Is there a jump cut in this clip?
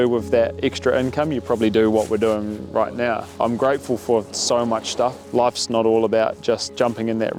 yes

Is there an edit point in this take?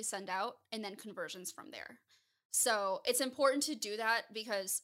no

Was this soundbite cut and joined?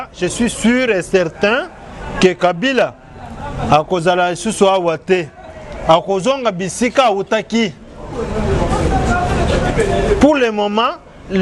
no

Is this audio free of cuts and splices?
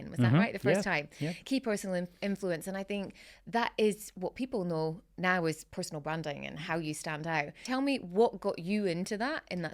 no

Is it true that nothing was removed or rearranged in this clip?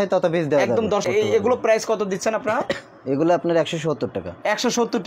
no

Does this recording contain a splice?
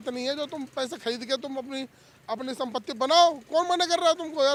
no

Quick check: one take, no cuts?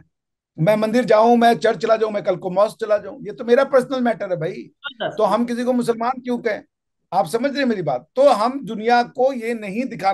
yes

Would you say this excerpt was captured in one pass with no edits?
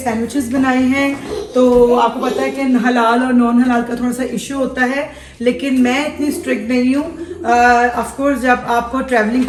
yes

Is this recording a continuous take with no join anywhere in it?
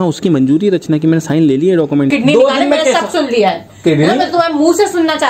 no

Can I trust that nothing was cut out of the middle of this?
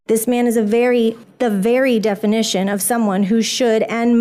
no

